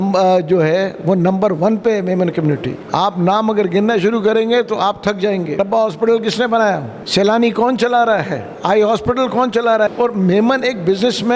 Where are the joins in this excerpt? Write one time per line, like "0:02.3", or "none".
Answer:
0:02.8
0:05.5
0:06.9
0:08.5
0:09.9